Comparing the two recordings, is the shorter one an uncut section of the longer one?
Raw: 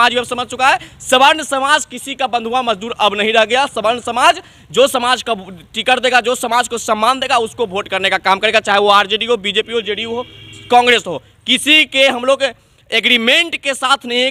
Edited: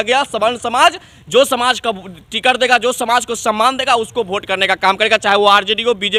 yes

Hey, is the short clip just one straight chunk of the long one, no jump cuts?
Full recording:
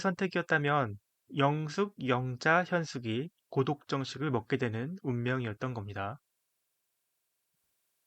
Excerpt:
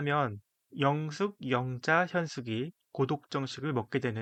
yes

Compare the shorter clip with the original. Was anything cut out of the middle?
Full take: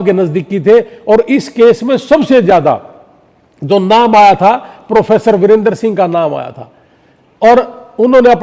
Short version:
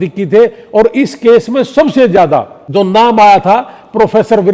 yes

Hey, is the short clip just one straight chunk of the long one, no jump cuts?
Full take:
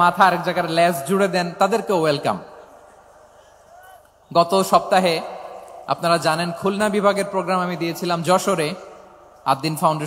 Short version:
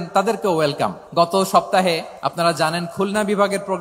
no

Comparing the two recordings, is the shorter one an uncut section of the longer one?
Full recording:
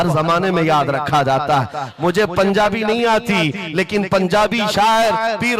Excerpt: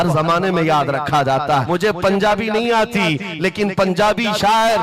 no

